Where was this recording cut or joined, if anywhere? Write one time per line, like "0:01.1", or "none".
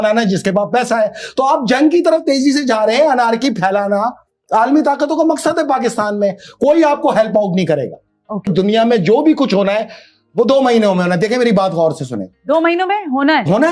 0:08.5

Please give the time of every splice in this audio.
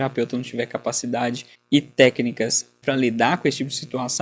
0:01.5
0:02.8

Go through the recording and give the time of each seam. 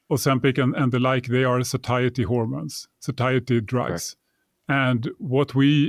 none

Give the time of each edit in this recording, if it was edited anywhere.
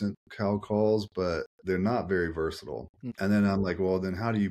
0:01.5
0:03.1

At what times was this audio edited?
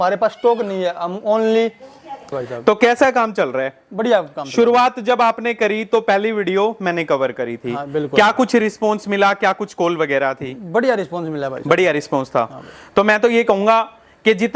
0:02.4

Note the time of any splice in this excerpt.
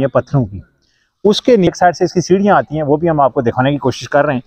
0:01.7

